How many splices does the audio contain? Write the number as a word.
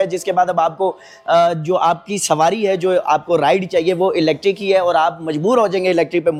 zero